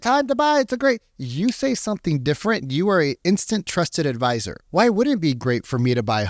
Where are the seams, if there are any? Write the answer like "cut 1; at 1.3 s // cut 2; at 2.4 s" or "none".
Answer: none